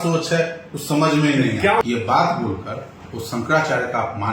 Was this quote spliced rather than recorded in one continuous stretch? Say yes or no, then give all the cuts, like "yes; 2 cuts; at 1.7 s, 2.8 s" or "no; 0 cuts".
yes; 1 cut; at 1.8 s